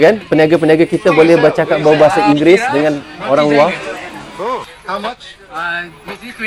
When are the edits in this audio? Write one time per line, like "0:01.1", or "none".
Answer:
none